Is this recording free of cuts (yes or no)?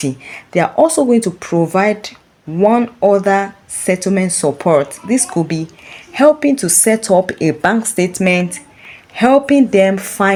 yes